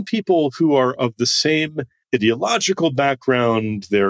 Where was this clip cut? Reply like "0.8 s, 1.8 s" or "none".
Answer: 1.9 s

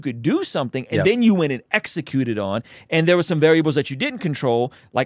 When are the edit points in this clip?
none

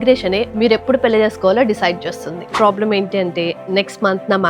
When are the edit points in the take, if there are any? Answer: 2.5 s

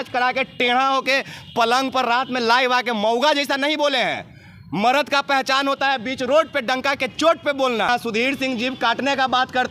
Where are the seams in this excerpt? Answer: 7.9 s

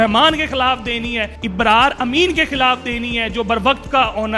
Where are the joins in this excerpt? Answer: 1.3 s

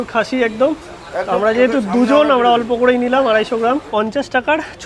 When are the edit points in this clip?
3.9 s

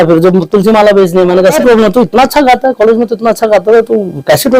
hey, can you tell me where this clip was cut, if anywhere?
1.6 s

